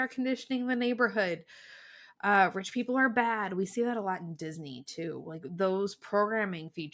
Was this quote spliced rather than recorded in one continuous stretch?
no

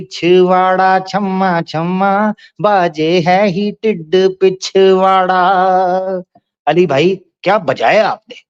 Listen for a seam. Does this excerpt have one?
no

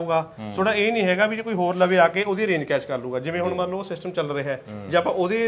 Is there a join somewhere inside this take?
no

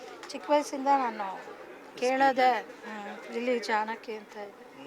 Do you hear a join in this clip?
no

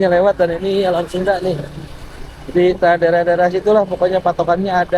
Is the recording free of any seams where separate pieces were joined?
yes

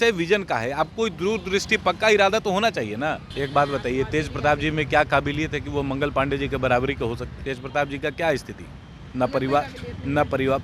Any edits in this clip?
yes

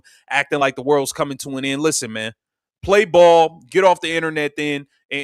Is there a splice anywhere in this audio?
yes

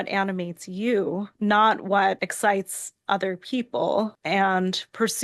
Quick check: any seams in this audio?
yes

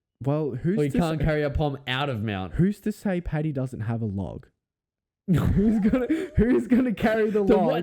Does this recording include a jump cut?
no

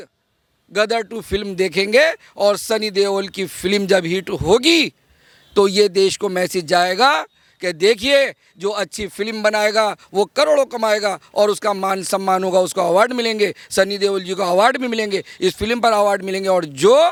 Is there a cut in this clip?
no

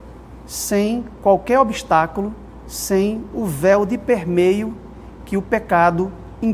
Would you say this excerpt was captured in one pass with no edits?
yes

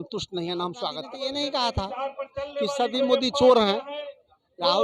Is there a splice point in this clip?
yes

